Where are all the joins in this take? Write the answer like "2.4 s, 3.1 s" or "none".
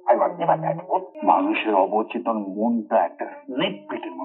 1.1 s